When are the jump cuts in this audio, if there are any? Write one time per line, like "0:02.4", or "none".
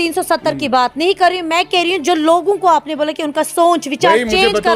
none